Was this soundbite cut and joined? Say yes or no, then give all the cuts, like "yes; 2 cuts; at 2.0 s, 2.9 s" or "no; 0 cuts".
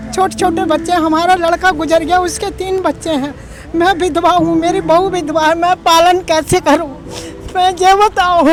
no; 0 cuts